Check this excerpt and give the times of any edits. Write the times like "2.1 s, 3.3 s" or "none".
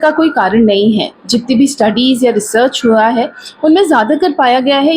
none